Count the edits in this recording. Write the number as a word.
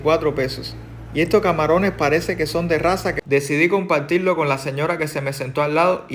one